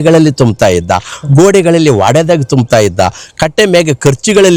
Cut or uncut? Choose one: uncut